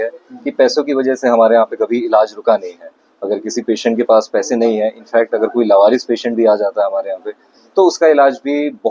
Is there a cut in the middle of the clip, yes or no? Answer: no